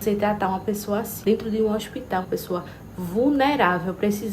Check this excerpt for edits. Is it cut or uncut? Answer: cut